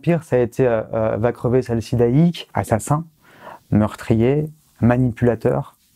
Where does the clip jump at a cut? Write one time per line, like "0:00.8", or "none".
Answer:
0:02.5